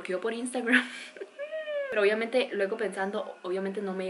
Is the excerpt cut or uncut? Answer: cut